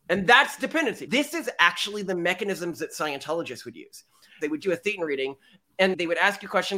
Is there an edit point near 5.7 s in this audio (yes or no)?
no